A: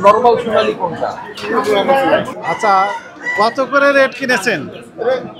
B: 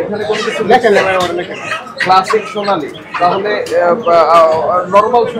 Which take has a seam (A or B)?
A